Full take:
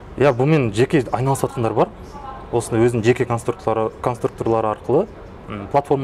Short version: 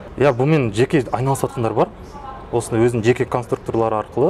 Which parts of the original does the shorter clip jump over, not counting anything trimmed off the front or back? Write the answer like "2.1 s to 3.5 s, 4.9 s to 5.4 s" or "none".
3.3 s to 4.0 s